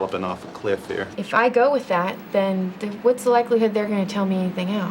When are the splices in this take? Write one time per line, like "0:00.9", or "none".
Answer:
0:01.1
0:03.9